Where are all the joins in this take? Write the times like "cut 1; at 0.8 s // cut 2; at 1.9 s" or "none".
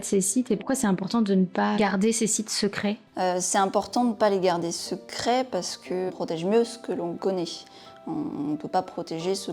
cut 1; at 6.1 s